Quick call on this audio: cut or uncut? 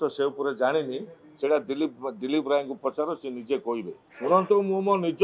cut